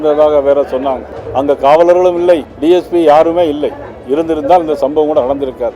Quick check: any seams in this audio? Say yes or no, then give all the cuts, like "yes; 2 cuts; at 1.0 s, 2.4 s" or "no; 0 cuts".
yes; 2 cuts; at 1.1 s, 2.5 s